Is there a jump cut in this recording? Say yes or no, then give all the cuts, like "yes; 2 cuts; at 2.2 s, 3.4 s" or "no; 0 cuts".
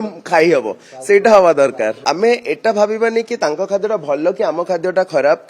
yes; 1 cut; at 2.0 s